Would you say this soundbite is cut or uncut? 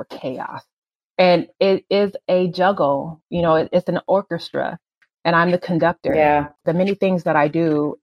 cut